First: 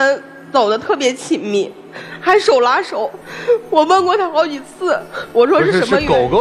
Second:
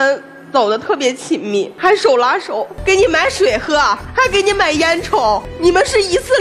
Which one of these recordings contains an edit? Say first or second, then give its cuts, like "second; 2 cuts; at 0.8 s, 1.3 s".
second; 4 cuts; at 1.7 s, 2.7 s, 4.0 s, 5.5 s